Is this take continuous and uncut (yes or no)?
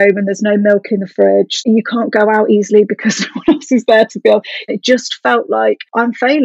no